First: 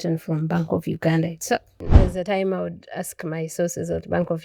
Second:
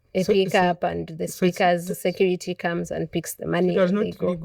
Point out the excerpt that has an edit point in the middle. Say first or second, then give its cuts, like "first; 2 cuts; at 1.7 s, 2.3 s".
first; 1 cut; at 1.9 s